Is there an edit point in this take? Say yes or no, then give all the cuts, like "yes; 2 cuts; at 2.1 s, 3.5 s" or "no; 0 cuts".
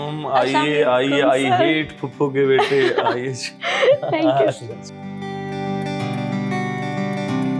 yes; 1 cut; at 5.0 s